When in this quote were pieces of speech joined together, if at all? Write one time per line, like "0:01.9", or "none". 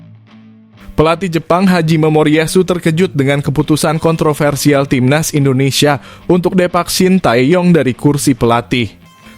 0:00.9